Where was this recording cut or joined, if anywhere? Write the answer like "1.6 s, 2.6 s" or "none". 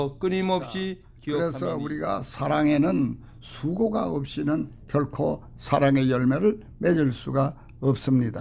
1.1 s